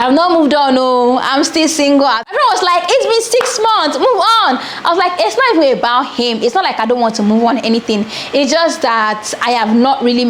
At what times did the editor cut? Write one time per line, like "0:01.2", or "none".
none